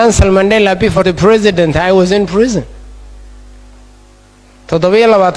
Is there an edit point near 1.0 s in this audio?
yes; 1 cut; at 1.0 s

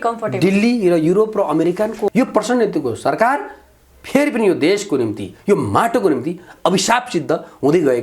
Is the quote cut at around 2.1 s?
yes; 1 cut; at 2.1 s

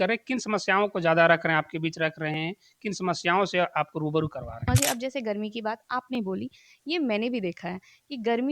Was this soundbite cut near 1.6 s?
no; 1 cut; at 4.7 s

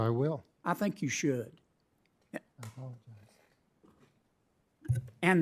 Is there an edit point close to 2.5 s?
yes; 1 cut; at 2.5 s

